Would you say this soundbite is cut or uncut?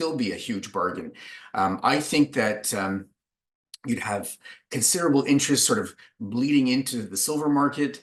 uncut